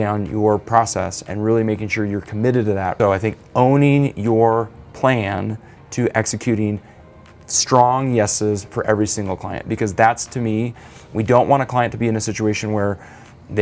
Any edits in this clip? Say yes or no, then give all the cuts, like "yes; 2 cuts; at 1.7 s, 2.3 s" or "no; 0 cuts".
yes; 1 cut; at 2.9 s